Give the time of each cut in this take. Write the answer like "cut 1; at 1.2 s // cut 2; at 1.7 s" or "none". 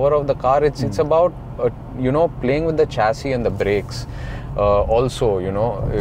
none